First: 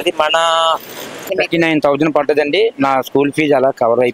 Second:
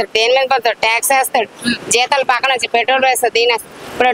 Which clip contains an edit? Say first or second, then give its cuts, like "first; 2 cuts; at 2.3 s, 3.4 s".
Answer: first; 1 cut; at 1.3 s